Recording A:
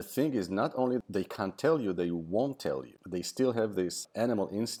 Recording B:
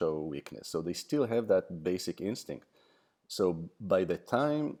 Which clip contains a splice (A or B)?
A